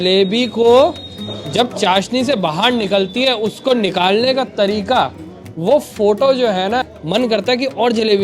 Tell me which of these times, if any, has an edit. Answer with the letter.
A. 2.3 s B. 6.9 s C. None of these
B